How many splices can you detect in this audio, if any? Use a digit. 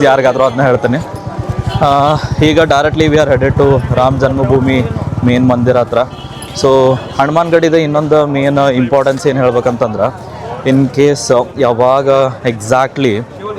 0